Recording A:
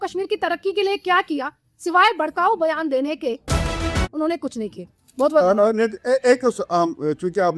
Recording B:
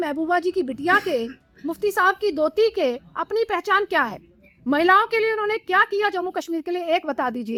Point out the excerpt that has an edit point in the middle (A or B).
A